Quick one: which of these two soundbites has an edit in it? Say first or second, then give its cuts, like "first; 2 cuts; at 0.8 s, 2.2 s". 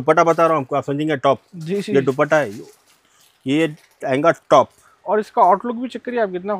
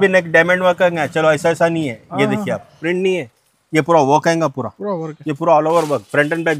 second; 1 cut; at 2.8 s